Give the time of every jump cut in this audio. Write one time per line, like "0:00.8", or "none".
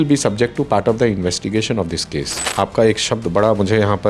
0:02.5